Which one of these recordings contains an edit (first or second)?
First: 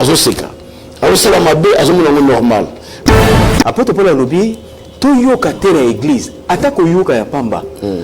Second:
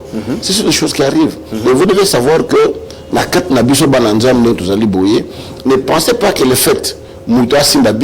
first